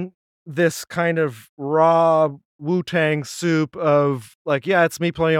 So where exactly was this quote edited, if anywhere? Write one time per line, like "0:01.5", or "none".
0:01.5
0:02.5
0:04.3

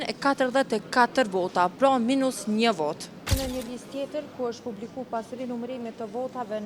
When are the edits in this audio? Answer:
0:03.3

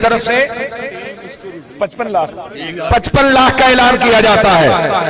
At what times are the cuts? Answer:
none

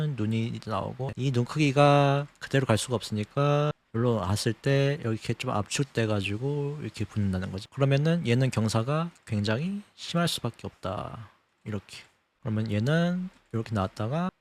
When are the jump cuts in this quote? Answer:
0:01.1
0:07.6
0:12.3

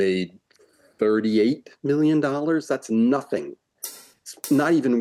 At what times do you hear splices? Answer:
none

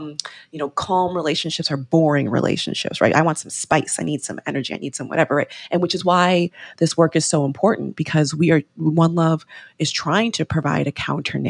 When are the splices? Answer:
0:05.6

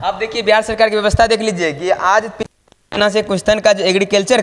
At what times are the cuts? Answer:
none

